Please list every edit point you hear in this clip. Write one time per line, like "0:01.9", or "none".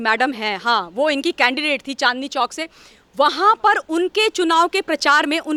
none